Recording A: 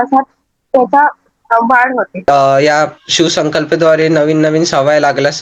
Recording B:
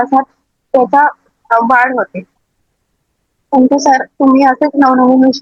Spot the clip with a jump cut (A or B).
A